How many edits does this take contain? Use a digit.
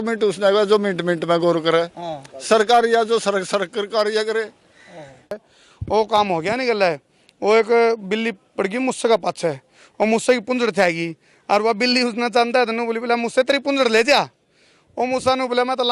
1